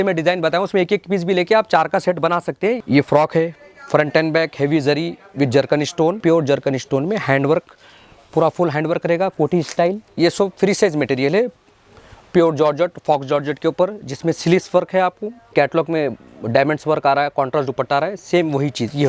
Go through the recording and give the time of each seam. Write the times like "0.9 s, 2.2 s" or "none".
2.8 s, 6.2 s, 10.1 s, 15.5 s